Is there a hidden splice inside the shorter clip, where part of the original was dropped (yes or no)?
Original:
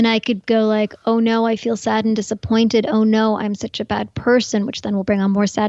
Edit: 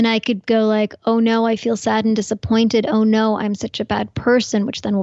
no